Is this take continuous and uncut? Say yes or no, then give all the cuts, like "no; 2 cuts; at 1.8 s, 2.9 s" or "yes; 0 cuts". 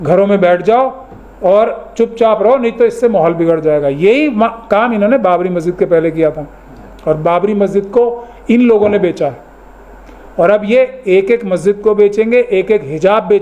yes; 0 cuts